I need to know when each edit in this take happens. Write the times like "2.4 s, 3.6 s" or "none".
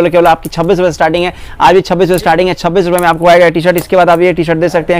none